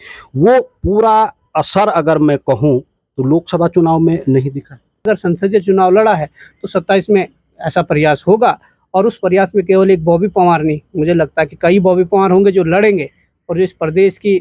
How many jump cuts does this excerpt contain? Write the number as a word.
one